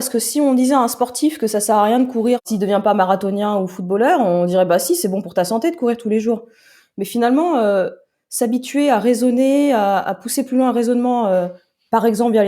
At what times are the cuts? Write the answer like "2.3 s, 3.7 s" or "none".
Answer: 2.4 s